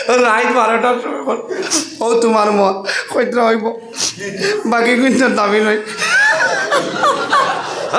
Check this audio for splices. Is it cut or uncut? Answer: uncut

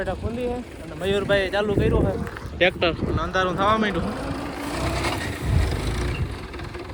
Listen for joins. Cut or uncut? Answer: uncut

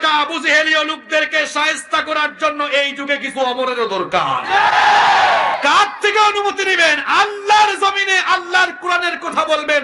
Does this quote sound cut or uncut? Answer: cut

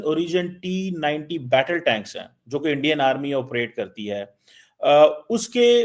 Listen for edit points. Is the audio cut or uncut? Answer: uncut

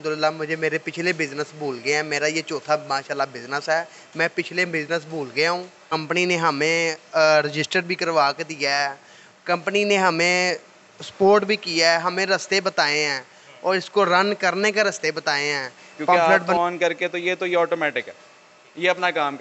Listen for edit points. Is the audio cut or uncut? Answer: cut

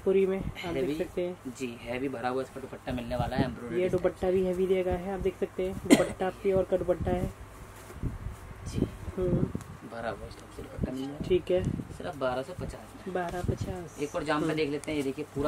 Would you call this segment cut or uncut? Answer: uncut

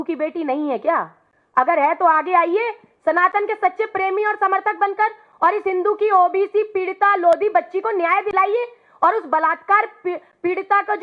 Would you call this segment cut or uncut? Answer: uncut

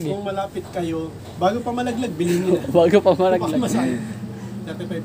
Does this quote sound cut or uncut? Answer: uncut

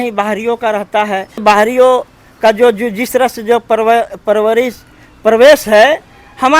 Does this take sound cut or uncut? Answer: cut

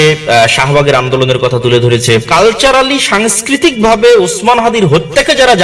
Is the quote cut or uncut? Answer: cut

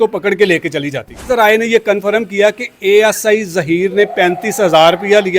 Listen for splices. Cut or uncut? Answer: cut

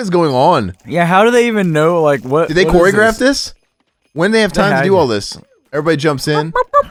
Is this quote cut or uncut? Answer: uncut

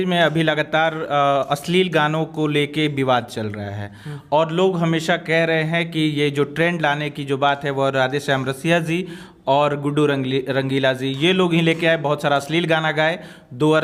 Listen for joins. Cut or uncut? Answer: uncut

